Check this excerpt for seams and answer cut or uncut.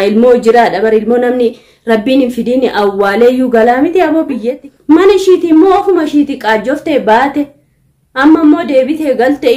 cut